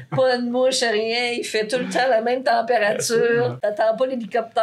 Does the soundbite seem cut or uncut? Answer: cut